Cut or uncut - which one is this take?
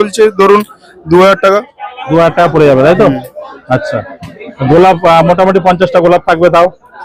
uncut